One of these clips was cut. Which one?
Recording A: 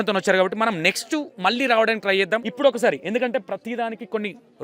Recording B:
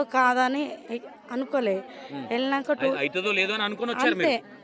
A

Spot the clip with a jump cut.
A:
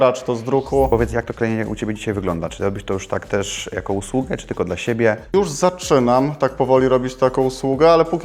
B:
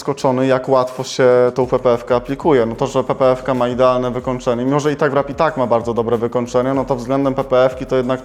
A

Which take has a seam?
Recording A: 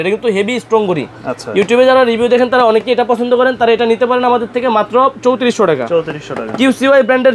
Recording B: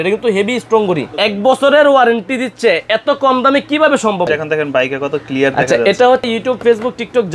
B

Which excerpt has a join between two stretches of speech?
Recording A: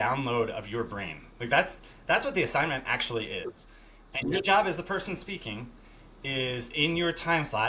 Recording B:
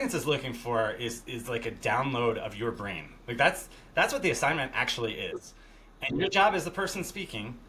A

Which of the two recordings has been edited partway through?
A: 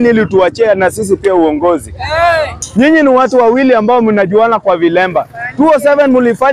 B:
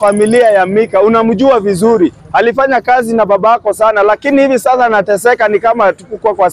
A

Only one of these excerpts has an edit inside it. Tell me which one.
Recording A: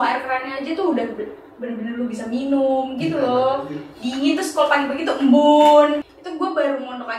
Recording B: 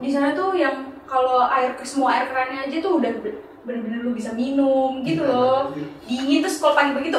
A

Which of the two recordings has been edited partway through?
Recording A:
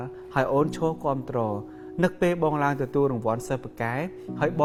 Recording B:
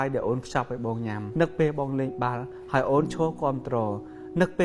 B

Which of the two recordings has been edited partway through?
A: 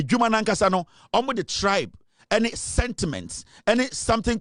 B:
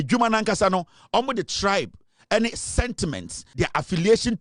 B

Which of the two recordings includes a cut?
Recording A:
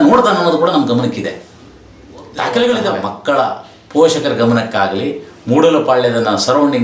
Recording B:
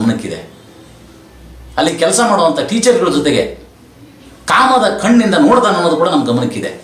A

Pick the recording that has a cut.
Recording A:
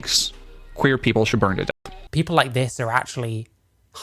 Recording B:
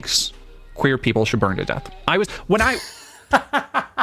A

